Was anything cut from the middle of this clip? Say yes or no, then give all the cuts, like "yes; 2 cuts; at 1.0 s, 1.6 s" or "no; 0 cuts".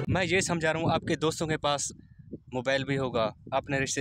no; 0 cuts